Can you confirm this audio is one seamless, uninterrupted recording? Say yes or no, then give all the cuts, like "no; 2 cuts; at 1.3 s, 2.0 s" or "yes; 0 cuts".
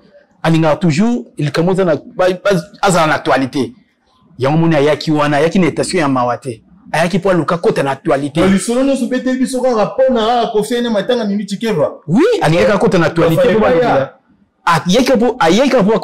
yes; 0 cuts